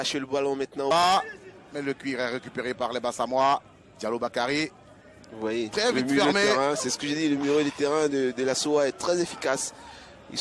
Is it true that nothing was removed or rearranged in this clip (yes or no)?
no